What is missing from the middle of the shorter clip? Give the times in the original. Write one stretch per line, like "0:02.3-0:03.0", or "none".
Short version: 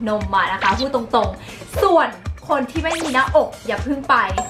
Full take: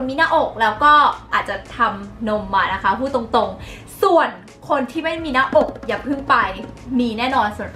none